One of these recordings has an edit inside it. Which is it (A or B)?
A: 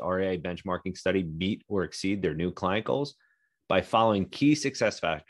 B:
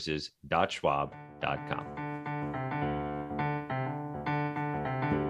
B